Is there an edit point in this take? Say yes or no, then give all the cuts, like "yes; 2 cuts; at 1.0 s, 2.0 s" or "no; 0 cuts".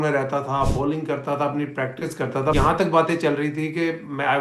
yes; 1 cut; at 2.5 s